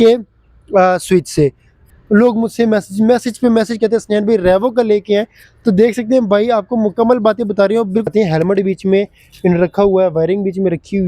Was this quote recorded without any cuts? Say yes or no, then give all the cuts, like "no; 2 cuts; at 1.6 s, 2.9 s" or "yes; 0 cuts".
no; 2 cuts; at 1.8 s, 8.1 s